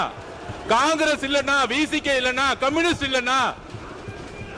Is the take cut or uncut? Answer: uncut